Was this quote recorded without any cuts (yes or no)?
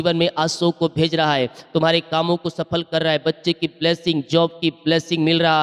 yes